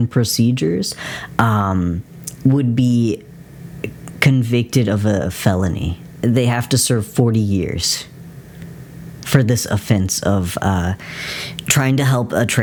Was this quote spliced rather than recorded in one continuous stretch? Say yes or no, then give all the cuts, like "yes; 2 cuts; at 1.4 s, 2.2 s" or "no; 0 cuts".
no; 0 cuts